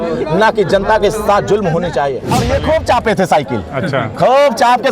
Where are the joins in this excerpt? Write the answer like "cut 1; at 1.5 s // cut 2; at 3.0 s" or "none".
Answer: cut 1; at 2.3 s